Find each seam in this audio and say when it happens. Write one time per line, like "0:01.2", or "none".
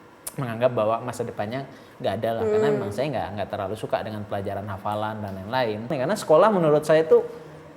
0:05.9

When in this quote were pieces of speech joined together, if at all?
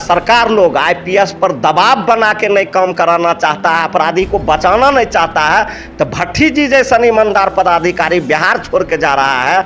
none

